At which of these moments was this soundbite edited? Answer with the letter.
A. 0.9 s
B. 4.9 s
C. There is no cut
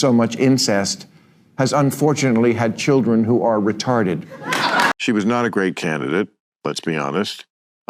B